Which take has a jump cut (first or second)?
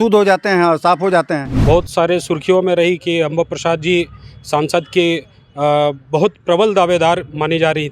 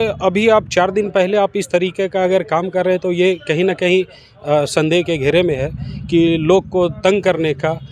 first